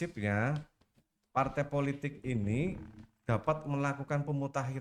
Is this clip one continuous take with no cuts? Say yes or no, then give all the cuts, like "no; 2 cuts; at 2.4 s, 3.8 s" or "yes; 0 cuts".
yes; 0 cuts